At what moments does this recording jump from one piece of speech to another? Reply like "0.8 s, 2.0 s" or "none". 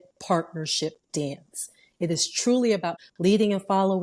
3.0 s